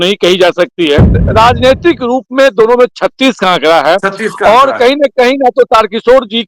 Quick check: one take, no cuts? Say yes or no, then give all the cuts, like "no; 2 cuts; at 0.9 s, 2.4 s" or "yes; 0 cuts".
no; 1 cut; at 1.2 s